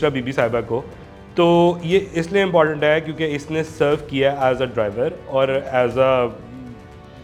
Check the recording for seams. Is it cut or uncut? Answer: uncut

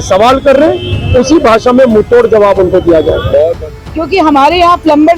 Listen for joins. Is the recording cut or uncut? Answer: cut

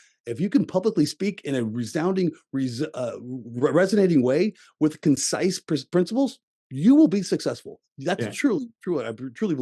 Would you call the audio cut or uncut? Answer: uncut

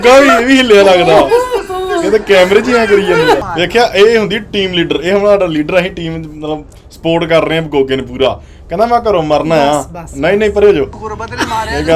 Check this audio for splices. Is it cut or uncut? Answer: cut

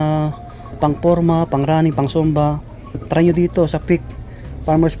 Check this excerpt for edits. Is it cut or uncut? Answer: uncut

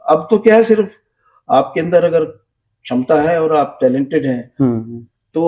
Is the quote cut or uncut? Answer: uncut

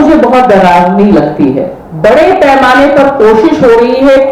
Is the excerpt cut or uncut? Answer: cut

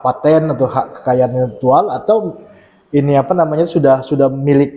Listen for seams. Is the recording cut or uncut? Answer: uncut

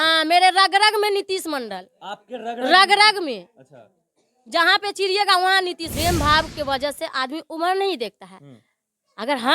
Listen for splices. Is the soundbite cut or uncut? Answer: cut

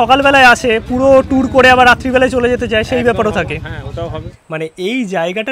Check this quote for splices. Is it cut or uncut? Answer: cut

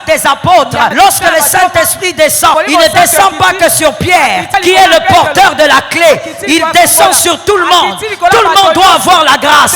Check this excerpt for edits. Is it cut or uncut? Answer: cut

